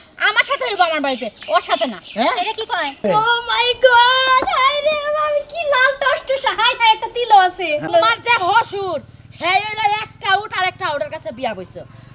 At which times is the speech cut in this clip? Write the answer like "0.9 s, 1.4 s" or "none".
3.0 s, 7.9 s